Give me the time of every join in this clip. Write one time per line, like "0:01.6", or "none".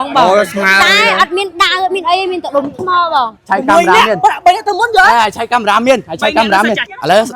0:03.4